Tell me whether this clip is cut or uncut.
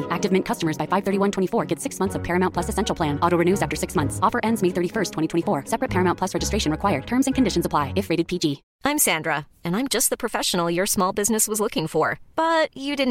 cut